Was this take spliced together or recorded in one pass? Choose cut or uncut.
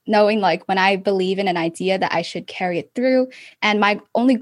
cut